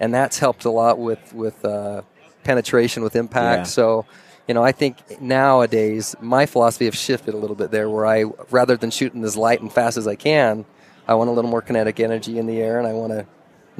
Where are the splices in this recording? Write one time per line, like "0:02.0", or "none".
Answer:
none